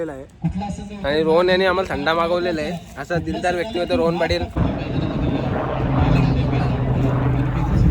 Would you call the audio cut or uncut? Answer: cut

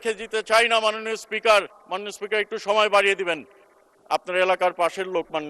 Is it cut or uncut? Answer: cut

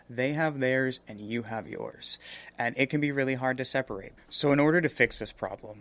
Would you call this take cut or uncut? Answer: uncut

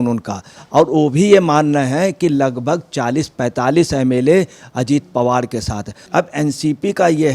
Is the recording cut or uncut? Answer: cut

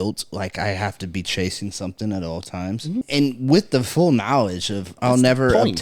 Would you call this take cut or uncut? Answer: cut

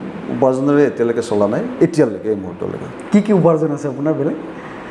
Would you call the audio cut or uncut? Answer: uncut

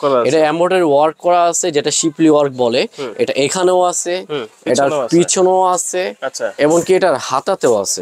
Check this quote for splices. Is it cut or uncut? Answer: uncut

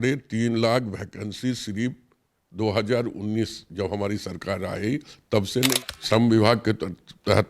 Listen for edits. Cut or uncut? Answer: cut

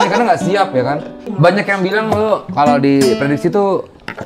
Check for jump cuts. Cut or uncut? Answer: cut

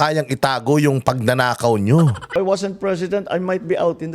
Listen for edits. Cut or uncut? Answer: cut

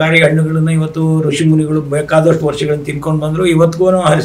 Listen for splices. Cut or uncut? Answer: uncut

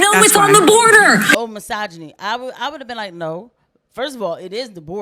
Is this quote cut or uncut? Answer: cut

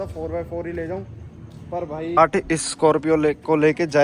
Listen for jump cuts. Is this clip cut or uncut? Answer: cut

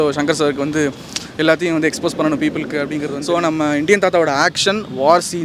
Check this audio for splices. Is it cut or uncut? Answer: cut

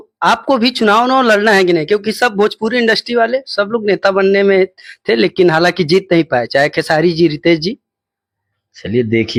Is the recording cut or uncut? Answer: uncut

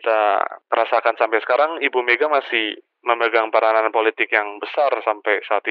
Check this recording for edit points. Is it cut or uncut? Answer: uncut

